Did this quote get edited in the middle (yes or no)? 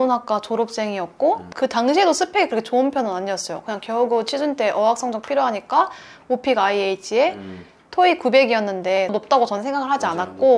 yes